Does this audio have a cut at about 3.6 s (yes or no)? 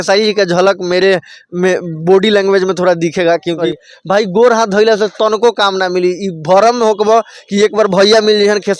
yes